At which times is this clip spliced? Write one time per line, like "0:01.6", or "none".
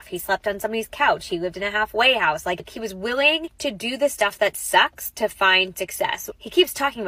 0:02.8
0:03.5
0:06.3